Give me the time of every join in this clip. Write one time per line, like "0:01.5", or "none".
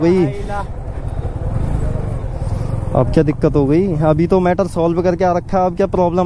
none